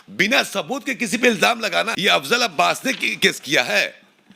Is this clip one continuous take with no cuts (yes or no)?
no